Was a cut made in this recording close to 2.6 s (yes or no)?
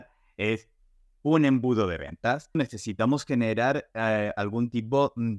yes